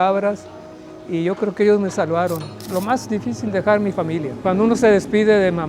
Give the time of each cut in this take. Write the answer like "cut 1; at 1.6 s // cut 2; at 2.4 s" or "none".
cut 1; at 2.5 s // cut 2; at 4.4 s